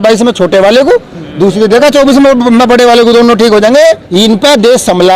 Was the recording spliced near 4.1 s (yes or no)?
yes